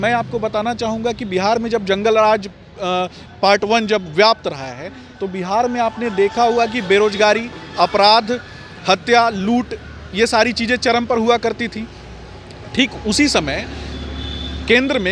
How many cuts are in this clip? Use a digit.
0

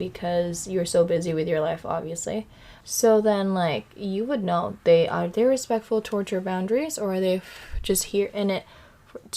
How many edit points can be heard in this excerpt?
1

